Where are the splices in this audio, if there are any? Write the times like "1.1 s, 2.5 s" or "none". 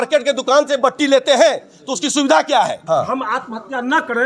2.8 s